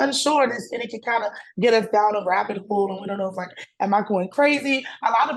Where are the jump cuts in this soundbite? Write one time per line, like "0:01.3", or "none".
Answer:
none